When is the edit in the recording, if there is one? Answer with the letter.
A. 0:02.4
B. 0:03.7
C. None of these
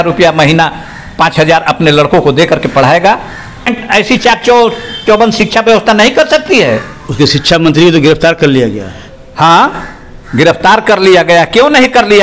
B